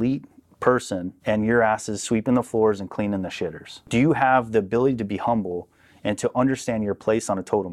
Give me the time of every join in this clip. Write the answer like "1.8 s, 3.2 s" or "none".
1.1 s, 3.9 s